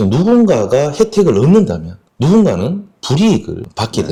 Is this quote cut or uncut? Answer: uncut